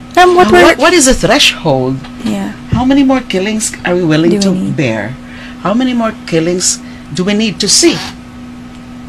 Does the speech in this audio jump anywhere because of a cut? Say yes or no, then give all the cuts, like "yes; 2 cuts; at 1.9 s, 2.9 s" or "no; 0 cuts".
no; 0 cuts